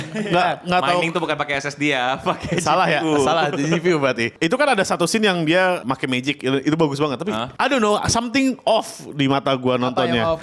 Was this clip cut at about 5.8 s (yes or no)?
yes